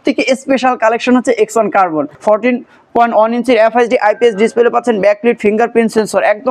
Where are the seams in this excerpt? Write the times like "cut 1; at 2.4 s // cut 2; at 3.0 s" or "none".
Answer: cut 1; at 2.1 s